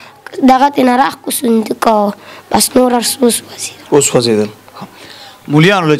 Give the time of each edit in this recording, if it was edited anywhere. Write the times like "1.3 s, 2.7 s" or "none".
none